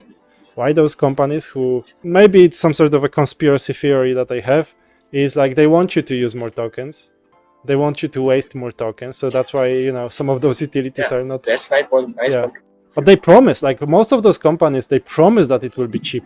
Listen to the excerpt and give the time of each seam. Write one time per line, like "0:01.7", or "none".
0:02.0